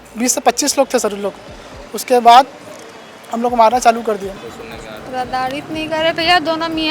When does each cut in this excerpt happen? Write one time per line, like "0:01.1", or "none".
0:04.3